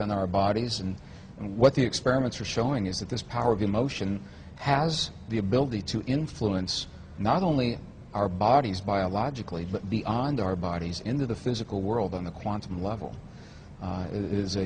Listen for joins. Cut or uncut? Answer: uncut